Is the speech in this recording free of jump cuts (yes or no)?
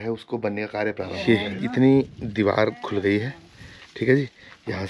no